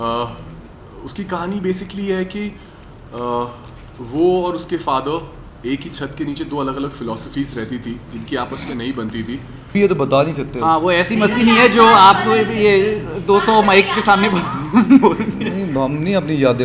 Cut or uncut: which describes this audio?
cut